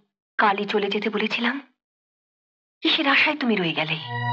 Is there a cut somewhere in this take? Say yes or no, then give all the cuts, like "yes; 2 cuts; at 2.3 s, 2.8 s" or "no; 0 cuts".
no; 0 cuts